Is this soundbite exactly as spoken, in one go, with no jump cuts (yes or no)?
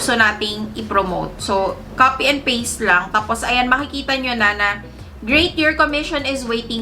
yes